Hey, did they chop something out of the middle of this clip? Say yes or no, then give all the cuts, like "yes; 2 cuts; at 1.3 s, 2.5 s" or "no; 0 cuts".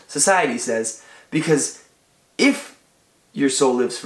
no; 0 cuts